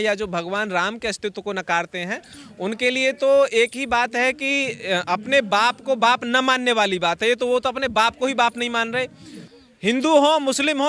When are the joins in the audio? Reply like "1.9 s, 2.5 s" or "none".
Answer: 9.4 s